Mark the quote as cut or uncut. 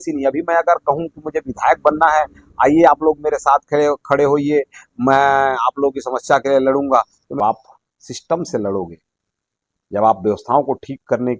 cut